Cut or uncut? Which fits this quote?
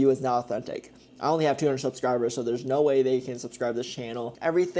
uncut